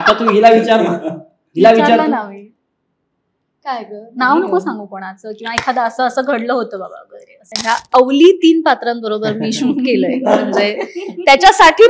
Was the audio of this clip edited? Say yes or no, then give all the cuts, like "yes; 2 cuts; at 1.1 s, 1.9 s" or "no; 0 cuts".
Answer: yes; 1 cut; at 7.5 s